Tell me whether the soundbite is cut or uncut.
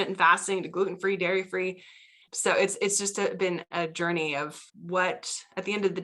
uncut